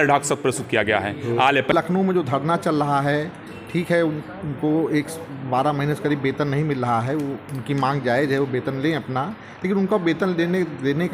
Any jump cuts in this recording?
yes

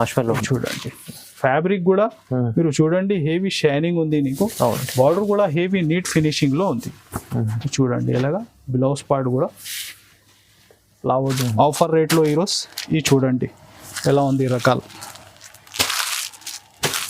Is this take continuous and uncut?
no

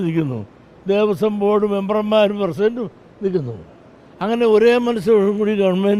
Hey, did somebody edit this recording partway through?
no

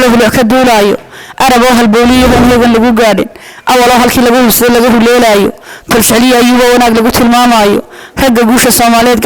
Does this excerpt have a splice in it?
no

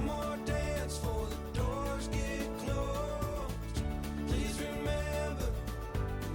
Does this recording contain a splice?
no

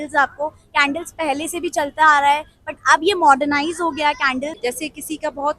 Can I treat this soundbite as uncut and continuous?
no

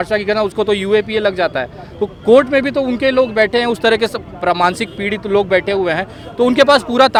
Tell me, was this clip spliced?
no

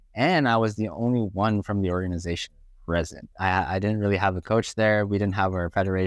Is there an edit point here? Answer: yes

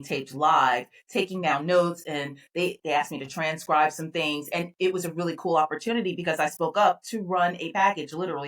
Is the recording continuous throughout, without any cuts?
yes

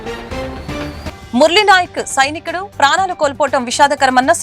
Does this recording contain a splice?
yes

